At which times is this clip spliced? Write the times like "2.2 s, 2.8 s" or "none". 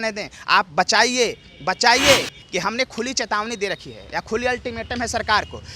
2.4 s